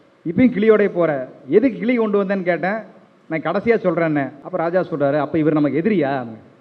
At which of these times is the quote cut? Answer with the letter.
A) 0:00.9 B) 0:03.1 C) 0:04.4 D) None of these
C